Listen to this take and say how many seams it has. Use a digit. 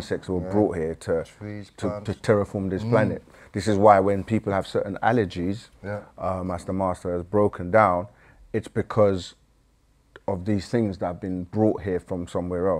0